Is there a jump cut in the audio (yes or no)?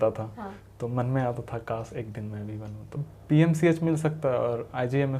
yes